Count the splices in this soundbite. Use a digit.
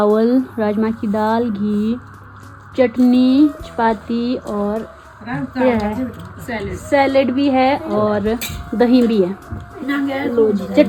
0